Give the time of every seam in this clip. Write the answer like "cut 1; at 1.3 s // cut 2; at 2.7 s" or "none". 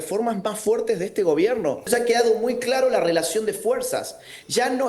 cut 1; at 1.9 s